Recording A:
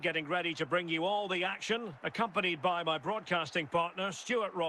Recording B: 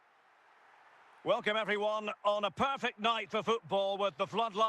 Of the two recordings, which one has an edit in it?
B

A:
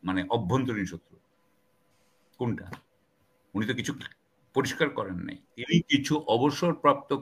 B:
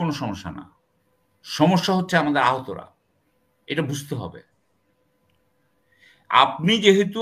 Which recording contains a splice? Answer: A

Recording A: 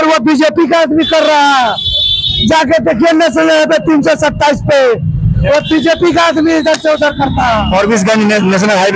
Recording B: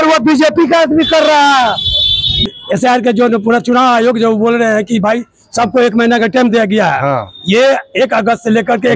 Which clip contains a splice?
B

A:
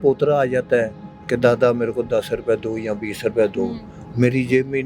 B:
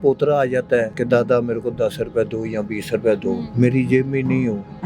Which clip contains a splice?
B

